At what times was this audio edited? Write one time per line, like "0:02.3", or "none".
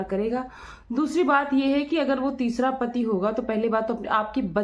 none